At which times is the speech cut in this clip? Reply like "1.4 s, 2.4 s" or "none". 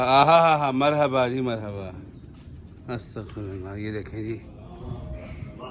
none